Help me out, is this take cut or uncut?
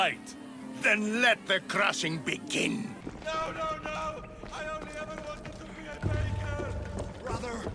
cut